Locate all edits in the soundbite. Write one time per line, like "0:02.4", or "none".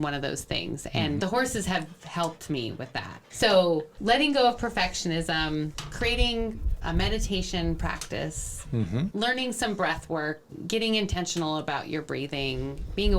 0:03.3
0:09.1
0:10.5